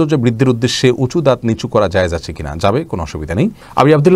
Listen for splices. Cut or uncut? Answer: uncut